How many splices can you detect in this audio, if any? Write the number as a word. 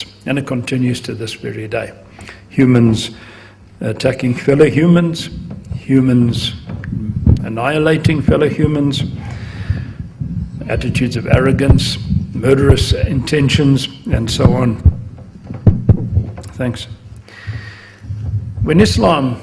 one